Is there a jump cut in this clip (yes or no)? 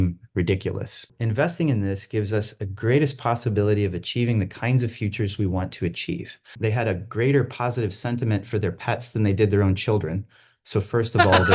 yes